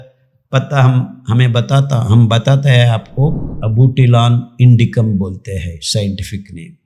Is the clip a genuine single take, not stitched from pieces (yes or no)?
no